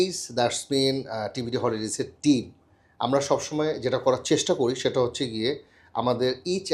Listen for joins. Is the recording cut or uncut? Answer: uncut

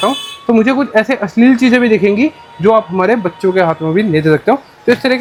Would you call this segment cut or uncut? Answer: uncut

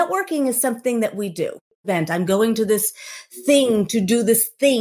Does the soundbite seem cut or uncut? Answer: cut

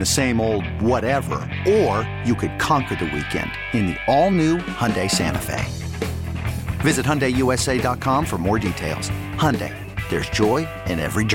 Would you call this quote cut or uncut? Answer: uncut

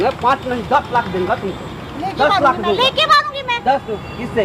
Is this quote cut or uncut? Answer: uncut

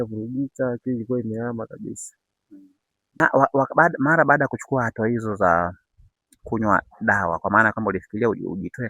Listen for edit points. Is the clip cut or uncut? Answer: cut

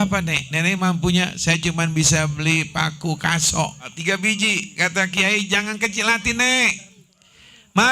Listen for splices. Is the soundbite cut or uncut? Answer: cut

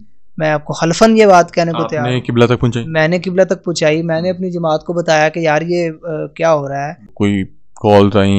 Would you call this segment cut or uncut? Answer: cut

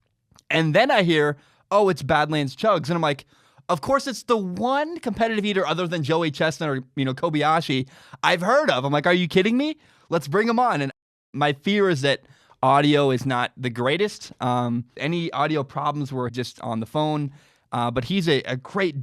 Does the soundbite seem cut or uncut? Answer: cut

